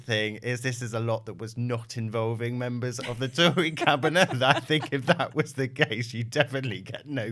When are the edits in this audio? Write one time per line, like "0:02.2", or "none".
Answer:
none